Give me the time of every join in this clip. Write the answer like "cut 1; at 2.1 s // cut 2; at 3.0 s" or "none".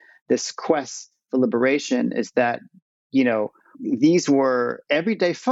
cut 1; at 3.7 s